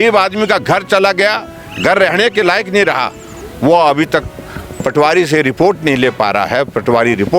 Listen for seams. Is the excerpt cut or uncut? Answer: uncut